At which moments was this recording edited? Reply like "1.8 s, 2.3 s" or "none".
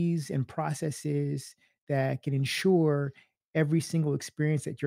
none